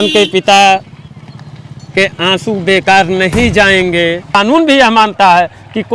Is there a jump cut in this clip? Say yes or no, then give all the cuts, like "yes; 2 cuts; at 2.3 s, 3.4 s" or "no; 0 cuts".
yes; 1 cut; at 4.4 s